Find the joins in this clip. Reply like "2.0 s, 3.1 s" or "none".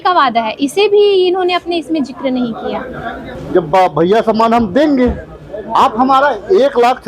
3.3 s, 5.7 s